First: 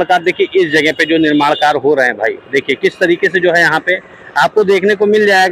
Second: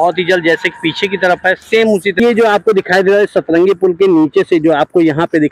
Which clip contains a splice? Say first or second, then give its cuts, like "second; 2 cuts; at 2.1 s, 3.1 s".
second; 1 cut; at 2.2 s